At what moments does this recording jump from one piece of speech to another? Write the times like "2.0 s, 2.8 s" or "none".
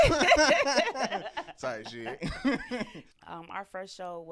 3.0 s